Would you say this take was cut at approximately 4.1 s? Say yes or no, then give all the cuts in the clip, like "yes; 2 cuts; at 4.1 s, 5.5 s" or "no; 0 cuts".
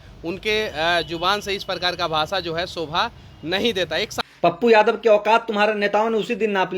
yes; 1 cut; at 4.1 s